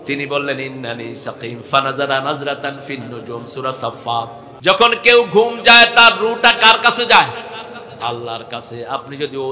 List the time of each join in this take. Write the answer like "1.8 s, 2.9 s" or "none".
4.4 s